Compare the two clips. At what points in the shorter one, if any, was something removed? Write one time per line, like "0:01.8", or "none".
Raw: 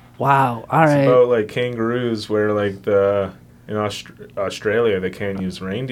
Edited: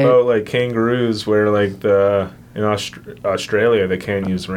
0:02.4